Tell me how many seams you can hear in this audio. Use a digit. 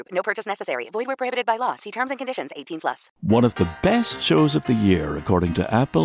1